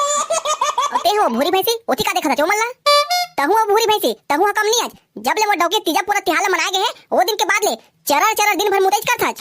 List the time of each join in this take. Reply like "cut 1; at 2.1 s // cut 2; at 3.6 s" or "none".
cut 1; at 1.0 s